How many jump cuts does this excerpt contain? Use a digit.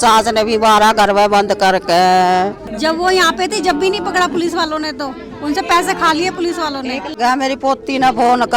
2